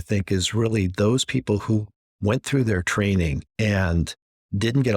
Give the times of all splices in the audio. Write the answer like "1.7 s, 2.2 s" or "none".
3.4 s